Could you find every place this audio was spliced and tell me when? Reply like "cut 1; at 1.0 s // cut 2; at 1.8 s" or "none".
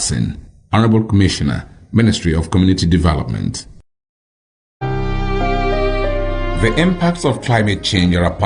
cut 1; at 4.8 s